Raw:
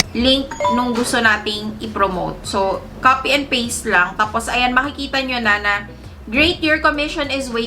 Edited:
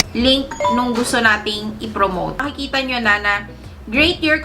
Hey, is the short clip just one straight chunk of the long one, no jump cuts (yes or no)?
no